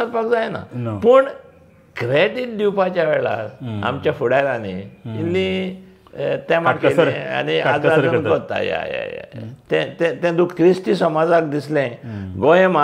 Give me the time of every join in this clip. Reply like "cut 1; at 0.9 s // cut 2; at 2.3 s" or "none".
cut 1; at 10.5 s

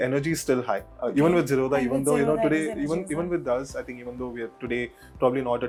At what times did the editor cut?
none

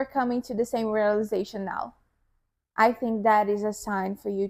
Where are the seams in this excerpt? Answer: none

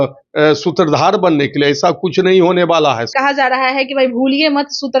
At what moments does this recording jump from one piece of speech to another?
cut 1; at 3.1 s

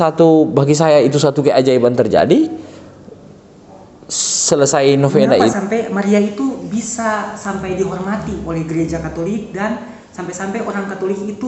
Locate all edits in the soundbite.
cut 1; at 5.5 s

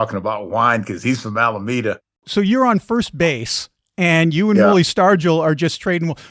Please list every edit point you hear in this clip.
cut 1; at 2.1 s

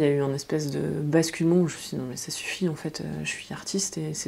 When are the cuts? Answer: none

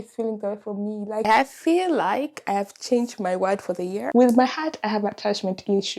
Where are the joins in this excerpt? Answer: cut 1; at 1.2 s // cut 2; at 4.0 s

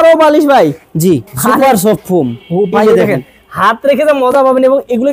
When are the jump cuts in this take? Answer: none

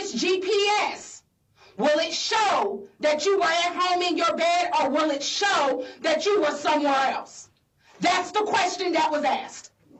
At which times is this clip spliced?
none

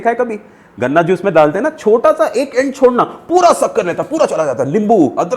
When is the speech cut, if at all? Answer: none

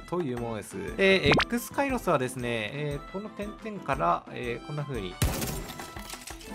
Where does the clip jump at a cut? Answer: cut 1; at 2.7 s

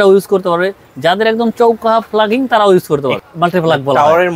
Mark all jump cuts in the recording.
cut 1; at 3.2 s

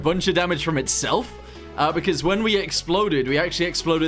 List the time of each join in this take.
none

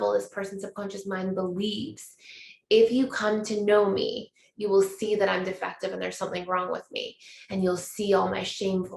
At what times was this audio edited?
none

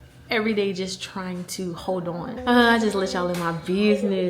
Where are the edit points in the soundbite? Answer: cut 1; at 2.4 s

